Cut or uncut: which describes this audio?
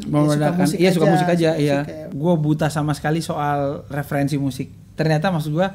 cut